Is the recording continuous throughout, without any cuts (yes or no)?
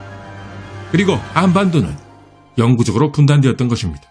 no